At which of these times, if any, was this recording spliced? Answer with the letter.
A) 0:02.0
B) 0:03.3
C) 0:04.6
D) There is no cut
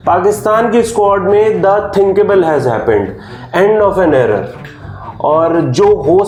D